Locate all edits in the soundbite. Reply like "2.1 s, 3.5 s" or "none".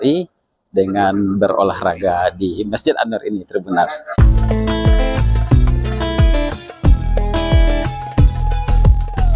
4.1 s